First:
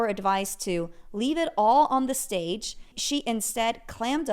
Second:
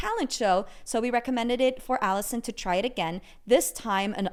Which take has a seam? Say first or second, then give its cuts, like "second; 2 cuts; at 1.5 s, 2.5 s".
first; 1 cut; at 3.0 s